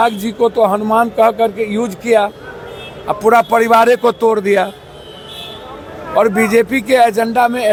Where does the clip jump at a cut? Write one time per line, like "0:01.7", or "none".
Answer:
none